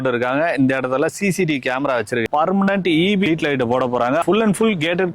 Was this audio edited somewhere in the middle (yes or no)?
yes